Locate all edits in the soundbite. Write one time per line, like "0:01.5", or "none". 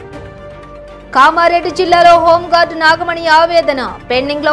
0:01.0

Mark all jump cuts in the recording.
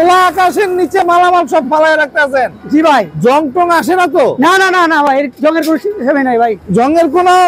none

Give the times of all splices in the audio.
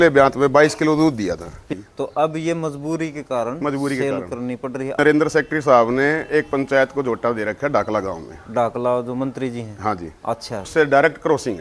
0:01.7
0:05.0
0:10.7

